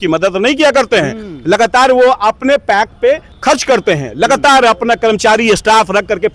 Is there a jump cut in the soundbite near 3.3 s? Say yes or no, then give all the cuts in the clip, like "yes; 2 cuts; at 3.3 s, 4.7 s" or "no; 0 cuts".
yes; 1 cut; at 3.3 s